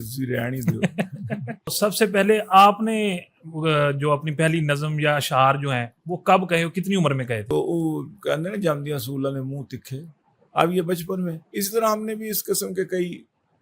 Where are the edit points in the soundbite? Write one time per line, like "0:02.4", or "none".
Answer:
0:01.7
0:07.5

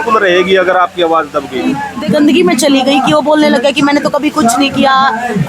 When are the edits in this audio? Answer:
0:01.9

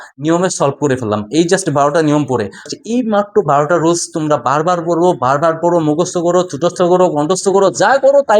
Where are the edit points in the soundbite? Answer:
0:02.7

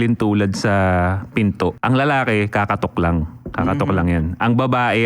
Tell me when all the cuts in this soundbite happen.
0:01.8

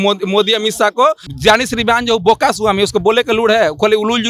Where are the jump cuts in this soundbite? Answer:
0:01.3

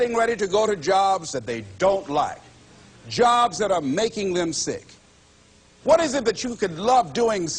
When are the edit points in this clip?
0:05.2

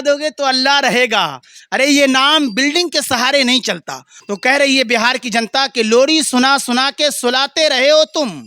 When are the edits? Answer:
0:04.3

